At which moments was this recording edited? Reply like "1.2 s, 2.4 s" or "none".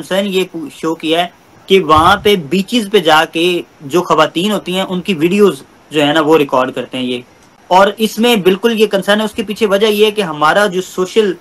none